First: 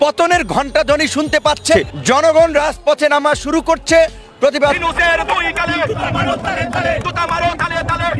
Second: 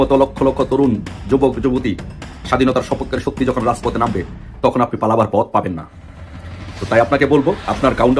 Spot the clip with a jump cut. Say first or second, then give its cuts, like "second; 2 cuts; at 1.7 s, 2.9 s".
first; 1 cut; at 4.8 s